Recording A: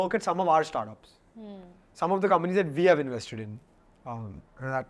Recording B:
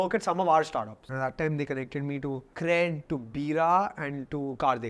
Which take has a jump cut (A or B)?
B